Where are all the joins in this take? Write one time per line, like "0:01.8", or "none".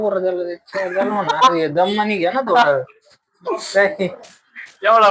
none